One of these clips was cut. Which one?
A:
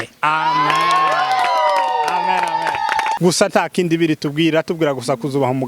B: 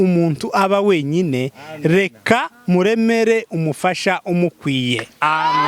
A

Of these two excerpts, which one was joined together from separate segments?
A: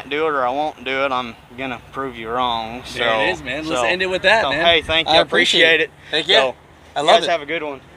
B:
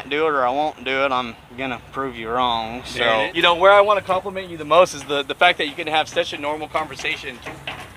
B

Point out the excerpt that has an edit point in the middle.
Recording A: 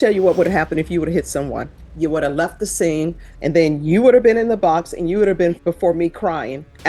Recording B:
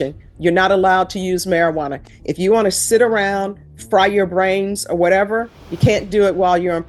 A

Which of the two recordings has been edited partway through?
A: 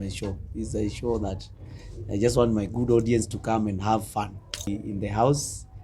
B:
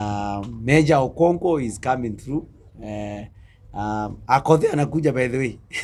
A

